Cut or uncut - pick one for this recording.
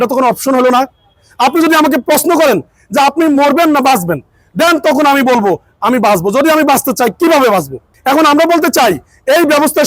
cut